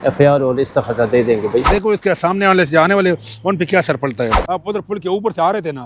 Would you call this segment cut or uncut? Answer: cut